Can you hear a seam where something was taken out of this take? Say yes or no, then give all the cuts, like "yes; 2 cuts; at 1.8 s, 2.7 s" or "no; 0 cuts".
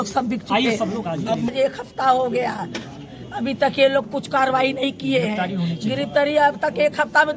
yes; 1 cut; at 1.5 s